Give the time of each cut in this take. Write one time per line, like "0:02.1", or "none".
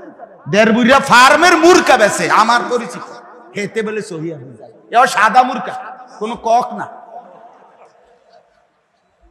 none

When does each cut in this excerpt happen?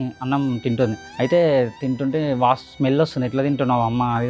0:01.0

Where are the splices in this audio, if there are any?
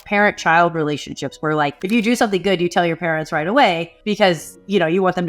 0:01.8
0:04.2

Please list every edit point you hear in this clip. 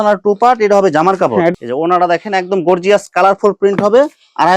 0:01.5

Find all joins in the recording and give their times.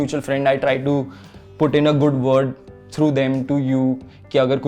none

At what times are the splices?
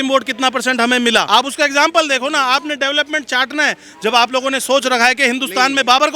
0:01.3

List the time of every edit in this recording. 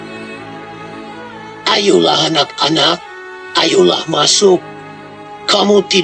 none

